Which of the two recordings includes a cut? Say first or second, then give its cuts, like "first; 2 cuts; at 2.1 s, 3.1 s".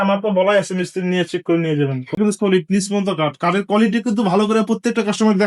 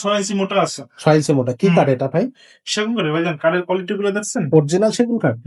first; 1 cut; at 2.2 s